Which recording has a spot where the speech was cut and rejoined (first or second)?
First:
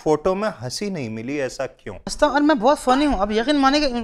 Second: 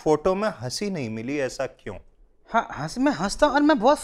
first